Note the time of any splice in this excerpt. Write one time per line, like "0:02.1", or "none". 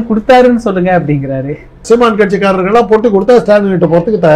0:01.8